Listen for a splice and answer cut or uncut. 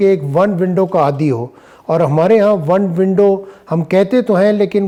uncut